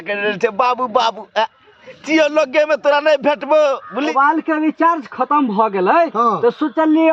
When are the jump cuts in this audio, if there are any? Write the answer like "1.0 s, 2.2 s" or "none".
4.0 s